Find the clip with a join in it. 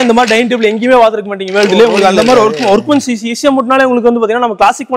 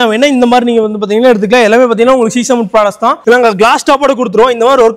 second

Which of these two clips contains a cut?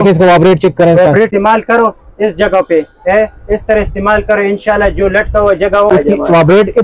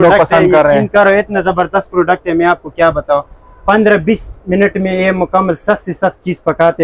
first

